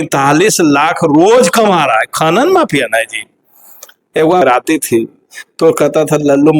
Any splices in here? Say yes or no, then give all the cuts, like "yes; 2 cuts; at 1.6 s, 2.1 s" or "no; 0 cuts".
yes; 1 cut; at 4.4 s